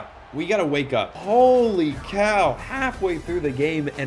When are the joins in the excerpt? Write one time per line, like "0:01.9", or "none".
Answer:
0:01.1